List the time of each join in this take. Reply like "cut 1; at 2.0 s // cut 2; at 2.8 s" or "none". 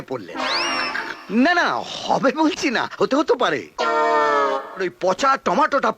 cut 1; at 4.9 s